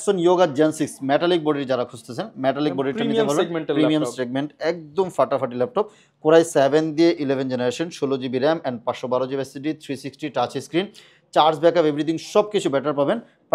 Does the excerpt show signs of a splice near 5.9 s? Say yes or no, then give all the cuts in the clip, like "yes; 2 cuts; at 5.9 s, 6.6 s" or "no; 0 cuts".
no; 0 cuts